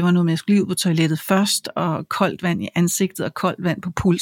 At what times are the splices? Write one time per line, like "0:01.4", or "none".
none